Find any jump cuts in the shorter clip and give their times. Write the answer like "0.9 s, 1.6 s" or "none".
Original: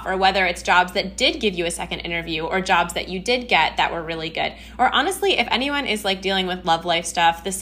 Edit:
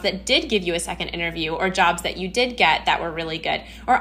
none